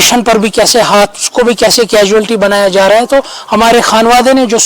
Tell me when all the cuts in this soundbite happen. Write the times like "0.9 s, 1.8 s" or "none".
none